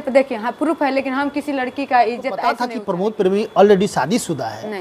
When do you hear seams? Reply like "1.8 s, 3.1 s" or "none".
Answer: 2.8 s